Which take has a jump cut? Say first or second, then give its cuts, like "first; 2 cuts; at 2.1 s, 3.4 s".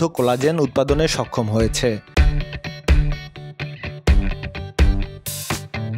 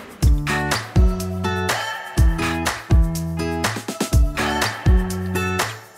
first; 1 cut; at 2.1 s